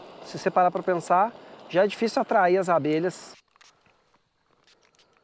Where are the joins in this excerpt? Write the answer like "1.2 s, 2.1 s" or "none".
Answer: 3.3 s